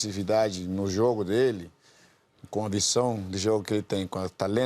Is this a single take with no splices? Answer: yes; 0 cuts

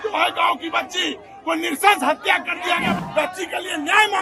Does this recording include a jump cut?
yes; 1 cut; at 3.0 s

